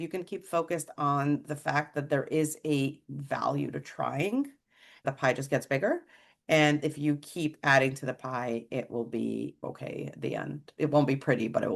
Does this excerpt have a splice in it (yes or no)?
yes